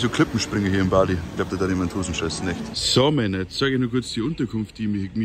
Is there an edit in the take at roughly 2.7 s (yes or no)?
yes